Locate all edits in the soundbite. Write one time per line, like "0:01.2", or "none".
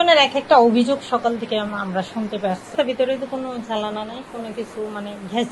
0:02.7